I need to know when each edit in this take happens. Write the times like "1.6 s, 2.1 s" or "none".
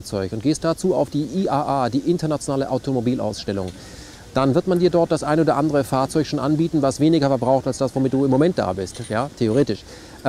none